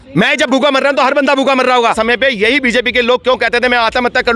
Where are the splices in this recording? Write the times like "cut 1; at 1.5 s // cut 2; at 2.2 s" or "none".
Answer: cut 1; at 2.0 s